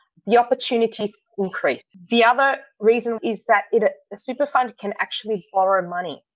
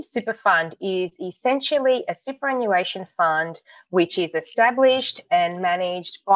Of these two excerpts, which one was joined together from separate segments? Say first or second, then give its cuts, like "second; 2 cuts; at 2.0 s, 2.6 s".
first; 1 cut; at 3.2 s